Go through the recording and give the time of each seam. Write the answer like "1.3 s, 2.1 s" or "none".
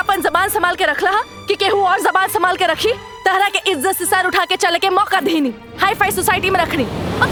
none